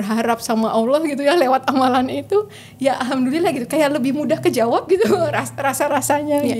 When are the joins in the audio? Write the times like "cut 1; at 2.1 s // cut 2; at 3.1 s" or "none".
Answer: none